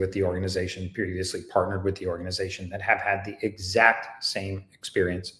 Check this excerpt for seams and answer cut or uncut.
uncut